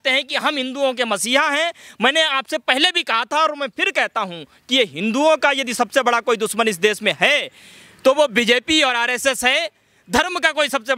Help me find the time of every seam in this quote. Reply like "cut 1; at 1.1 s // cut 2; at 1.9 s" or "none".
none